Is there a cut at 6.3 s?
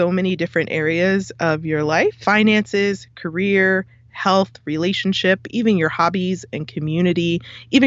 no; 1 cut; at 2.2 s

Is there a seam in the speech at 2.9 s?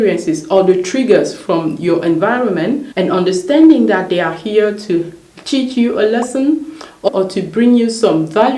yes; 2 cuts; at 2.9 s, 7.1 s

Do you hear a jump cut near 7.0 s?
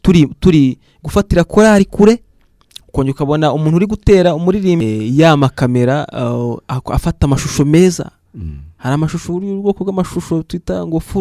no; 1 cut; at 4.8 s

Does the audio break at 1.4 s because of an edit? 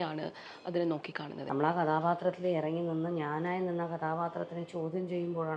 yes; 1 cut; at 1.4 s

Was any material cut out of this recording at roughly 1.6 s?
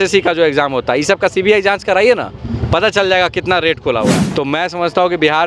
no; 1 cut; at 4.2 s

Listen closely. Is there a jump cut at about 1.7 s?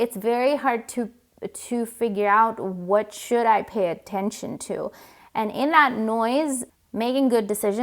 no; 1 cut; at 6.6 s

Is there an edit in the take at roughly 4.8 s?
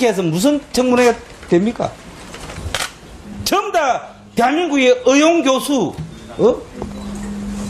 yes; 1 cut; at 4.8 s

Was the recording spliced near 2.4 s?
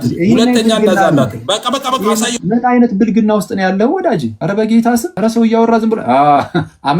no; 2 cuts; at 4.3 s, 5.1 s

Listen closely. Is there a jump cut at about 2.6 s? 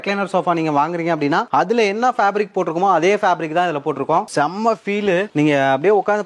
no; 1 cut; at 4.3 s

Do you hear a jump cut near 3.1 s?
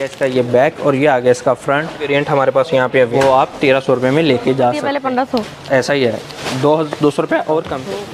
yes; 3 cuts; at 2.0 s, 3.1 s, 4.9 s

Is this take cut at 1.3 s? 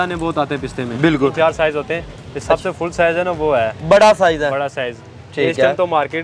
yes; 1 cut; at 1.3 s

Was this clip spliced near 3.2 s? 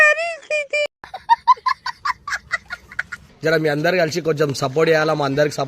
yes; 1 cut; at 3.2 s

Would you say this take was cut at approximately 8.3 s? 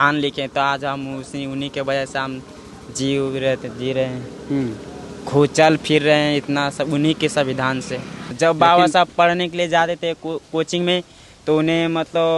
yes; 1 cut; at 8.3 s

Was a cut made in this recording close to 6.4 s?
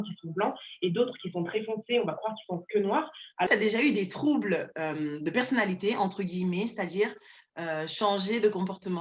no; 1 cut; at 3.5 s

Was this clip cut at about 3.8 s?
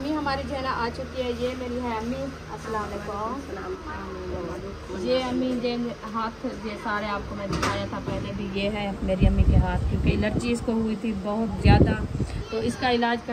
yes; 1 cut; at 3.8 s

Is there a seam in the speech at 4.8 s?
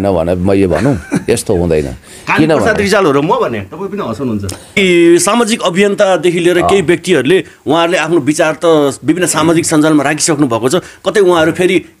yes; 1 cut; at 4.8 s

